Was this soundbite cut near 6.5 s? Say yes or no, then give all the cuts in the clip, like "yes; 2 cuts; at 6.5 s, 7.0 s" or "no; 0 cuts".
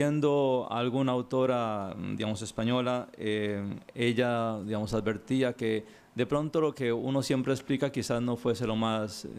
yes; 1 cut; at 6.5 s